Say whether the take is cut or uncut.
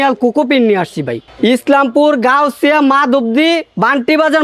cut